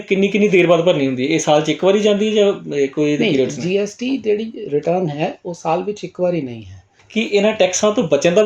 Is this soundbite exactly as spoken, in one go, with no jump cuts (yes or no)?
no